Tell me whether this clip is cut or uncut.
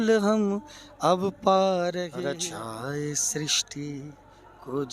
cut